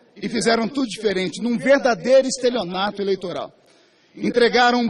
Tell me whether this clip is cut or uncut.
cut